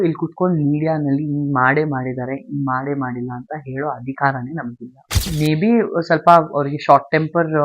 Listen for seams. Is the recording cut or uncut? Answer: cut